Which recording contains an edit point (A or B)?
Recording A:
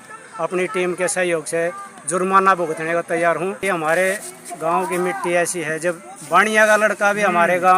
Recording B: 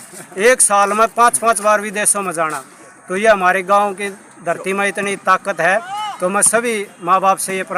A